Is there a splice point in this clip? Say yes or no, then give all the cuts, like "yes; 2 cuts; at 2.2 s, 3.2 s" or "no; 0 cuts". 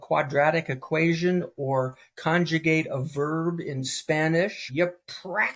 yes; 1 cut; at 4.6 s